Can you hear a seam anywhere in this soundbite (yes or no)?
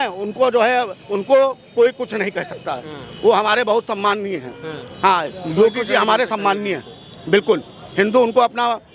no